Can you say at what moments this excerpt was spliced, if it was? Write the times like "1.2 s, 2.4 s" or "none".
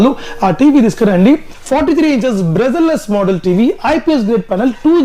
1.6 s